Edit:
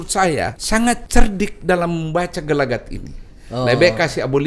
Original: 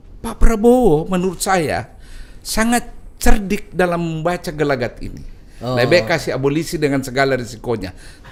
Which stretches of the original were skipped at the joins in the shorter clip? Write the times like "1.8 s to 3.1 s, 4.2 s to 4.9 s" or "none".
2.2 s to 3.0 s